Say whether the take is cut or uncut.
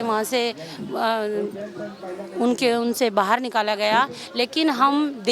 uncut